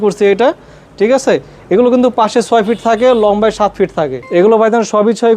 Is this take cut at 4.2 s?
yes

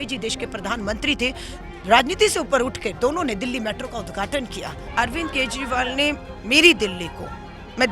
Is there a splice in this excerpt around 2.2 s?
no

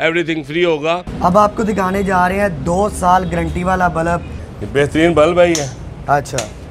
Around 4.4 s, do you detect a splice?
yes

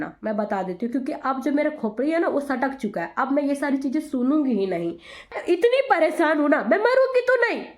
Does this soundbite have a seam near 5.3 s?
yes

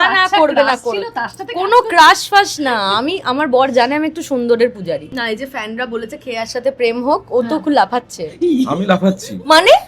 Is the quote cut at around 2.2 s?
no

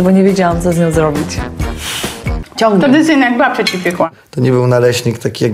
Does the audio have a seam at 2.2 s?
yes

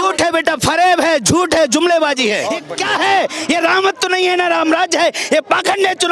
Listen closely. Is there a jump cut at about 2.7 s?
yes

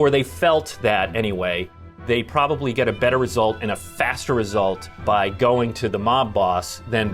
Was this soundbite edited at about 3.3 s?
no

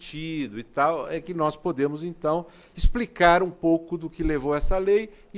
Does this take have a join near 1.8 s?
yes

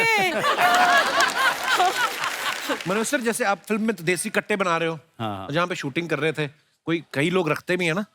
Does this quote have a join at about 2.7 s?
yes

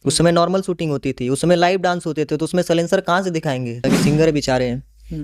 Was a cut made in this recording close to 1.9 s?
no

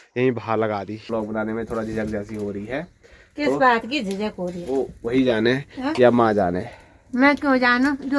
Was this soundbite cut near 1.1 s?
yes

